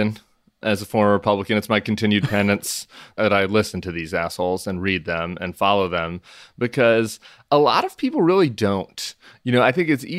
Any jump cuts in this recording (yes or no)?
yes